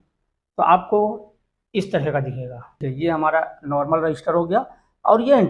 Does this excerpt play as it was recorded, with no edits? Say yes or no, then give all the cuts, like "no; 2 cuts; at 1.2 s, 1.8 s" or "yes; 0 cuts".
no; 1 cut; at 2.8 s